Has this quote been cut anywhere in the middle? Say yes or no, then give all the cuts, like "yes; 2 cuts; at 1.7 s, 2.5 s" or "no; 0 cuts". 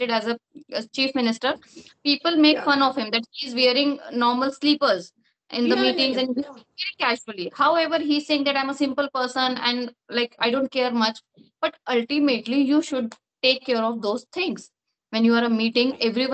no; 0 cuts